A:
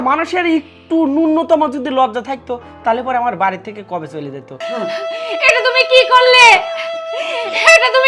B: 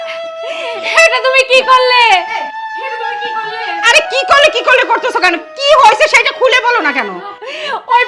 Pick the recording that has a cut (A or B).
A